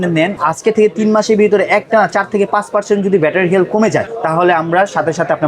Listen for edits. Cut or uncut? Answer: uncut